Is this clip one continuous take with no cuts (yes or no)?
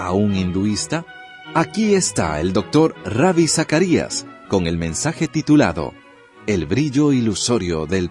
no